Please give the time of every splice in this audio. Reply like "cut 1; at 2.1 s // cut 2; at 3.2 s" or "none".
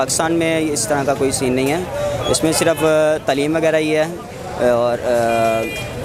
none